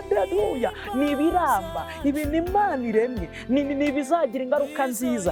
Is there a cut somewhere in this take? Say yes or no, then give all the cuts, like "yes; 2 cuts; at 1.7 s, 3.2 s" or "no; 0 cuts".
no; 0 cuts